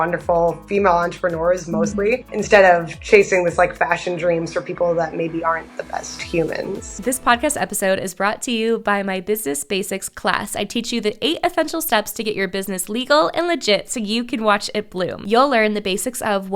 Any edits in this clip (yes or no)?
yes